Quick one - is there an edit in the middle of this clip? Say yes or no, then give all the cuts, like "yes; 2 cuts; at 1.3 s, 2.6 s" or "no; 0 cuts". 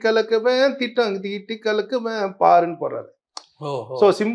no; 0 cuts